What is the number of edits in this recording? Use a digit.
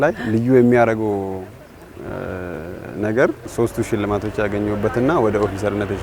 1